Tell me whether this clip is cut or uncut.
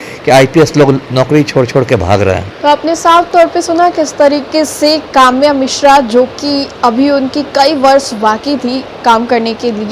uncut